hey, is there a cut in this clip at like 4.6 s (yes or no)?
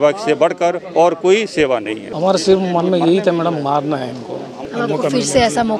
yes